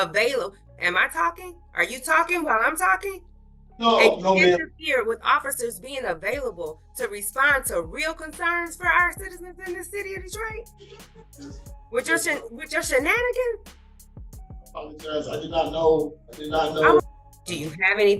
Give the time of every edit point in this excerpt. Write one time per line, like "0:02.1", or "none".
0:17.0